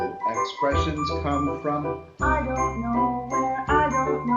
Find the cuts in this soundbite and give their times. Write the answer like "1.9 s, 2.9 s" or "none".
none

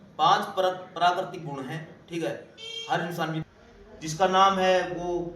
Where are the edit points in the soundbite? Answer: 3.4 s

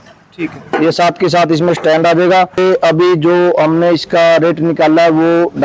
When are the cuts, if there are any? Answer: 2.5 s

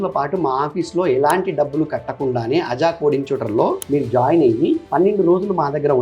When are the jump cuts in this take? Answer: 3.8 s, 4.9 s

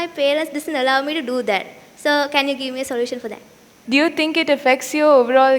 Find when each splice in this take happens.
3.7 s

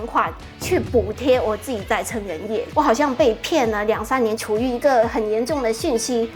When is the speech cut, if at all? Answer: 2.7 s, 4.4 s

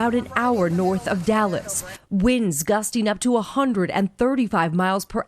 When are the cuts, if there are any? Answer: 1.9 s

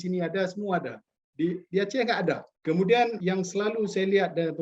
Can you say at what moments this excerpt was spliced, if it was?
2.5 s, 3.2 s

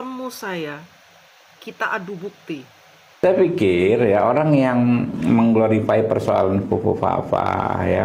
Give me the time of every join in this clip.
3.2 s

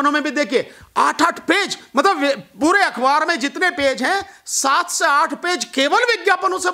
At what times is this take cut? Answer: none

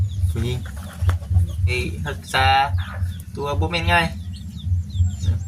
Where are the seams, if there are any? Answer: 1.7 s

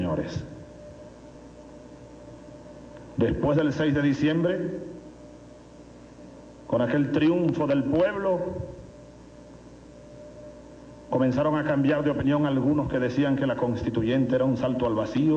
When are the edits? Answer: 9.7 s

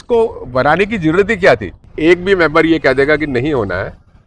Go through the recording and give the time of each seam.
1.7 s

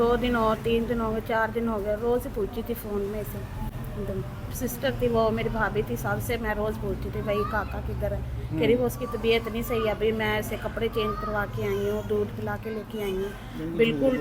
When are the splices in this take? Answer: none

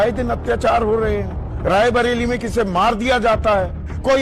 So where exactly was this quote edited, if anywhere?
none

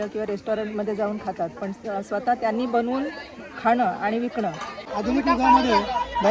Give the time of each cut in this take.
4.8 s

